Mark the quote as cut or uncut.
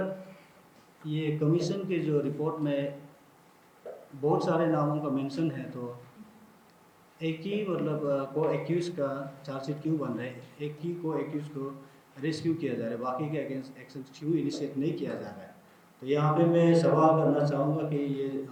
uncut